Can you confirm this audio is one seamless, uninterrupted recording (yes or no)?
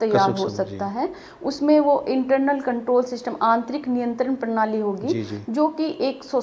yes